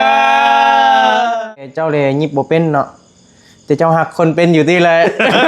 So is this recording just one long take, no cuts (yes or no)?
no